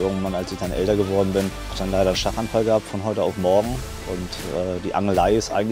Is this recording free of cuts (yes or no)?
no